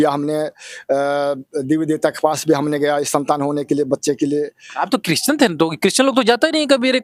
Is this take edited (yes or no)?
no